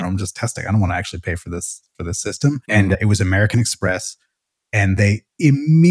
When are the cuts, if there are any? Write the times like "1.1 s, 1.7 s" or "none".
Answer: 2.6 s